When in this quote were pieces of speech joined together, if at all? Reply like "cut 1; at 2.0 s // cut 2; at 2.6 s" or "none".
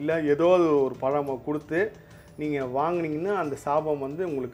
none

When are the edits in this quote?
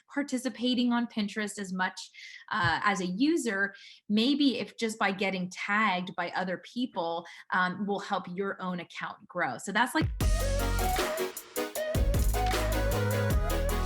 cut 1; at 10.1 s

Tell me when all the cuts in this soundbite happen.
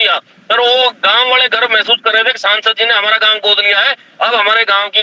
none

